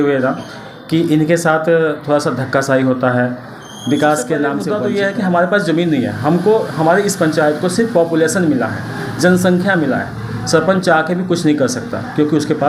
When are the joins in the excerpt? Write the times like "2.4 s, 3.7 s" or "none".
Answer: 4.7 s